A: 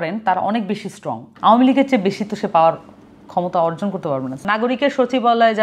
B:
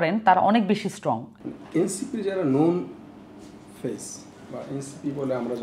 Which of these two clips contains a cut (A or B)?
A